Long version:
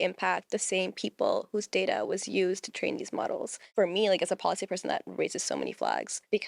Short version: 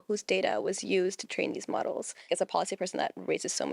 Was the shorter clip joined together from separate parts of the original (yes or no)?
yes